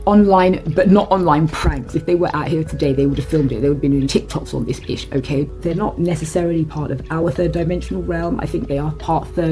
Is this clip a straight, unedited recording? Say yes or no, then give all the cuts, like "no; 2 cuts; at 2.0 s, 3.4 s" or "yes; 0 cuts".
no; 1 cut; at 5.5 s